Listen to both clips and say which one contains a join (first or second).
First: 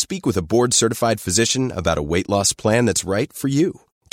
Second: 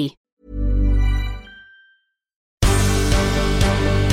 second